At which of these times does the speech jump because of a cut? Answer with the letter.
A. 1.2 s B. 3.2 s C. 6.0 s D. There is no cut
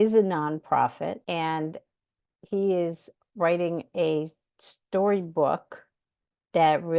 A